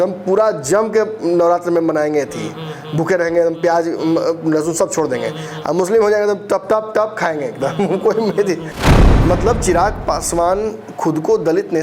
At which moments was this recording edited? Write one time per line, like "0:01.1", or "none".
0:08.9